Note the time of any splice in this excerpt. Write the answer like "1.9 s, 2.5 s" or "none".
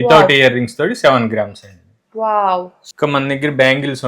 2.8 s